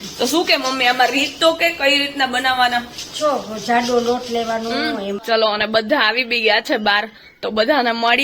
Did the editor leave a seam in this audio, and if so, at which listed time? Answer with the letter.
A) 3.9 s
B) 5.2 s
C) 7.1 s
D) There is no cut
B